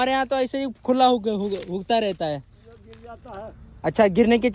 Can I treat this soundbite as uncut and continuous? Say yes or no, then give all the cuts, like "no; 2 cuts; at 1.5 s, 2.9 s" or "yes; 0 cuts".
yes; 0 cuts